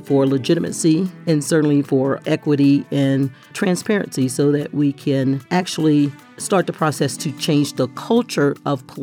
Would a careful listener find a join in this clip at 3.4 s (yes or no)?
no